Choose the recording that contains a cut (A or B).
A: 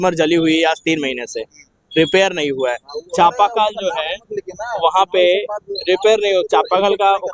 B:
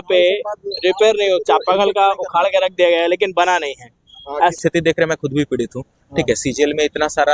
B